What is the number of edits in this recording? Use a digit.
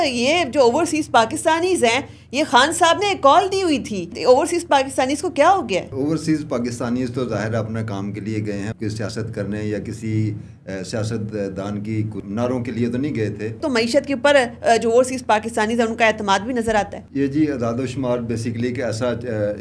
6